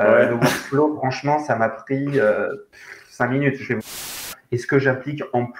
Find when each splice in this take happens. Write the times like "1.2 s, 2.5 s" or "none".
4.2 s